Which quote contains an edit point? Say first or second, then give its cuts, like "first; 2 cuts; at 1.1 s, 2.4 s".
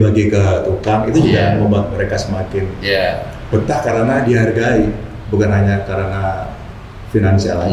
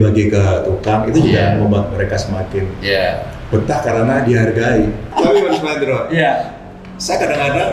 second; 1 cut; at 5.1 s